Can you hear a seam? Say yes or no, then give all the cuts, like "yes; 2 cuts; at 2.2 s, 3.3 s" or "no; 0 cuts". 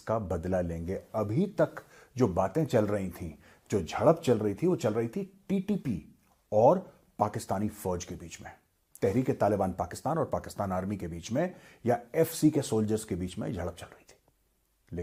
no; 0 cuts